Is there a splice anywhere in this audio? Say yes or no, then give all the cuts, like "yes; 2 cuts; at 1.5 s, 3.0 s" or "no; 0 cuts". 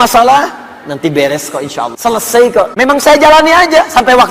yes; 2 cuts; at 1.9 s, 2.7 s